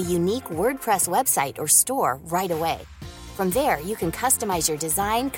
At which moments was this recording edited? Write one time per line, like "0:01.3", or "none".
none